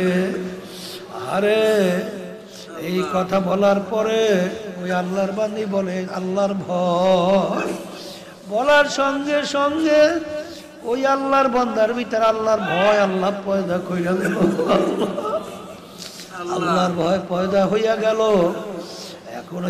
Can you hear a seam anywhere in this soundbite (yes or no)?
no